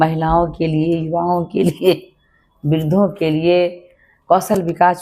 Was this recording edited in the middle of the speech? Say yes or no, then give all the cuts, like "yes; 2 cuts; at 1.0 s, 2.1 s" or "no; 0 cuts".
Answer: no; 0 cuts